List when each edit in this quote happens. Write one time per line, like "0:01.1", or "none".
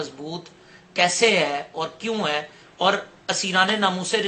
none

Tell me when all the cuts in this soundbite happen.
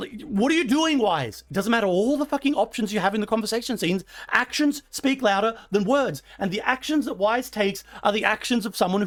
none

